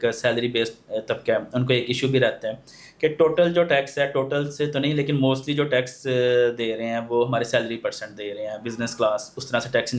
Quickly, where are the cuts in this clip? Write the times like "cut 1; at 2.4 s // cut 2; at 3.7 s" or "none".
none